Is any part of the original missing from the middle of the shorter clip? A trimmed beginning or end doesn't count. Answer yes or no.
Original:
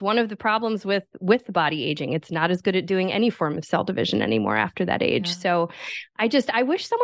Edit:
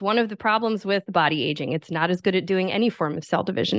yes